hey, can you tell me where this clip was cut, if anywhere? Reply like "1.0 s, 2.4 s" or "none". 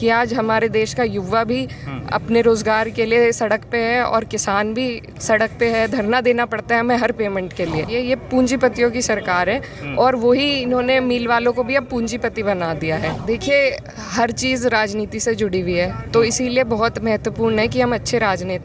7.8 s, 13.2 s